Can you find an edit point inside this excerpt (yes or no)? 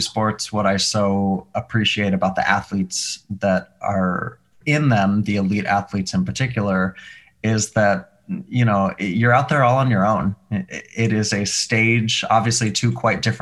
no